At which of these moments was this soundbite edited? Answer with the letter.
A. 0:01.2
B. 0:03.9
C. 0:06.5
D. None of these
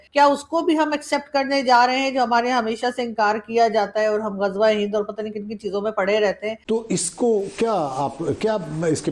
C